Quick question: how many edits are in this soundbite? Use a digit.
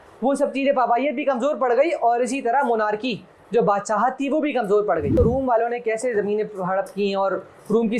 1